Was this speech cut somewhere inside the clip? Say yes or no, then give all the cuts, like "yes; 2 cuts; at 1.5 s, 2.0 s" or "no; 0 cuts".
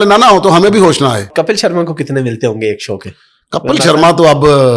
yes; 1 cut; at 1.3 s